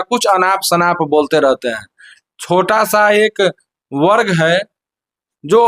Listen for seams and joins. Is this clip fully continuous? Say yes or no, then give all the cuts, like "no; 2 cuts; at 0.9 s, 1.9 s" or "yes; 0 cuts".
yes; 0 cuts